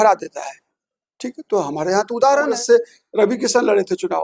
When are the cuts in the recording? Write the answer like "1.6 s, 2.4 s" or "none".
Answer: 2.5 s